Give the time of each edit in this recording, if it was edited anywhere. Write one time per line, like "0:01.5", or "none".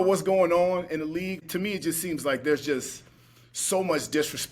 0:01.4